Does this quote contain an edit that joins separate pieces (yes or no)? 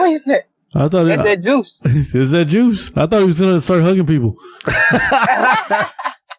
no